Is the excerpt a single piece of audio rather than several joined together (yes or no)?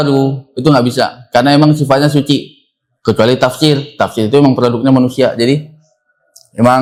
yes